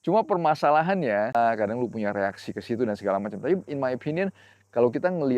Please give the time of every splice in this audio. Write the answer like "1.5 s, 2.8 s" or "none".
1.3 s